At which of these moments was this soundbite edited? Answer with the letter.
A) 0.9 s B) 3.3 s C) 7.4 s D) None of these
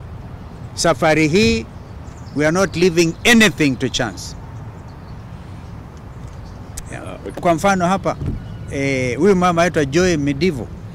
C